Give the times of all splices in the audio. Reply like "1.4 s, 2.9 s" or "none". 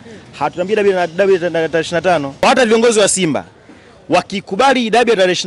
2.4 s